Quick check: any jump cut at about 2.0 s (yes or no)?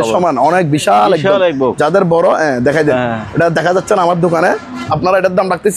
no